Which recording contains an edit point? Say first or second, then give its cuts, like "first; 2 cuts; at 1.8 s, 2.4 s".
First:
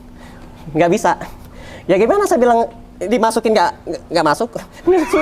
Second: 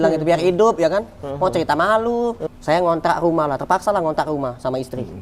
second; 1 cut; at 2.4 s